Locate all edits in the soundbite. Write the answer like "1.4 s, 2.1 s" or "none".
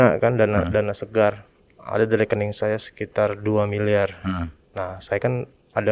4.6 s